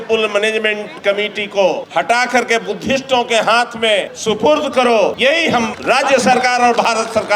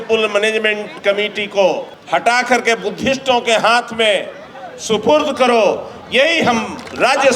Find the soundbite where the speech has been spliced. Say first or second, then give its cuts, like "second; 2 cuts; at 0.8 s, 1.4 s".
first; 3 cuts; at 1.8 s, 4.1 s, 5.5 s